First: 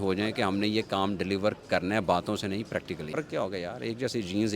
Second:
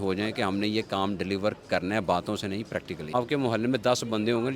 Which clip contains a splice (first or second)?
first